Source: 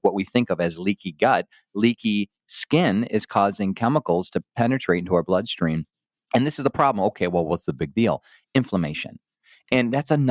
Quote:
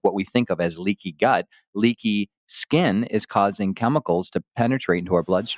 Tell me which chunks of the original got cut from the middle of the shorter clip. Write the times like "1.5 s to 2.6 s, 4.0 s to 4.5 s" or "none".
none